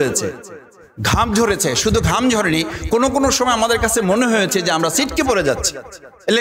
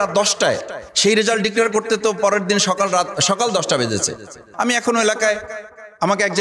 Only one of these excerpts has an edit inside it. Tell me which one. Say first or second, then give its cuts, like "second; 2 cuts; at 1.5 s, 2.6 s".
second; 1 cut; at 4.4 s